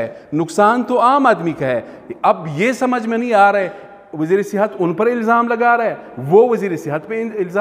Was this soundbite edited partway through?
no; 0 cuts

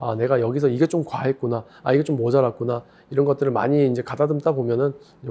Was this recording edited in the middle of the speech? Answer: no; 0 cuts

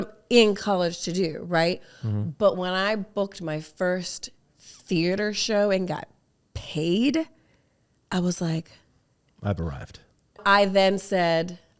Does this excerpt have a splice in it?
yes; 1 cut; at 10.4 s

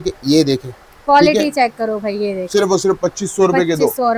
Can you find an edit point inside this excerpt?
no; 0 cuts

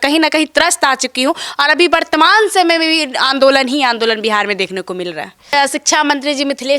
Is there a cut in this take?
yes; 1 cut; at 5.5 s

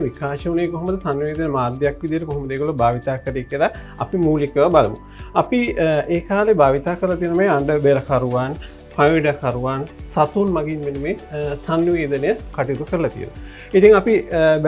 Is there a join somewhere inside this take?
no; 0 cuts

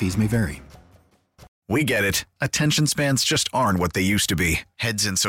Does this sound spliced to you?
yes; 1 cut; at 1.5 s

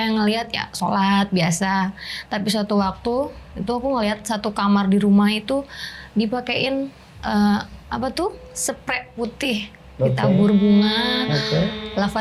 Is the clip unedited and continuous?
yes; 0 cuts

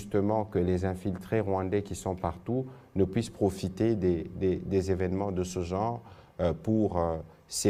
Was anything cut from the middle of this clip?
no; 0 cuts

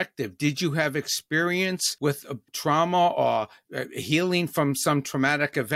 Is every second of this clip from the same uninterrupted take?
no; 1 cut; at 2.4 s

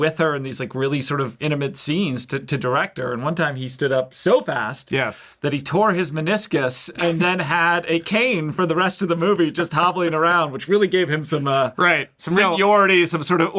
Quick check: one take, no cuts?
yes; 0 cuts

